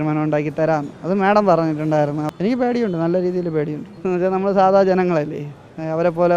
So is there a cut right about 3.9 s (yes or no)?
yes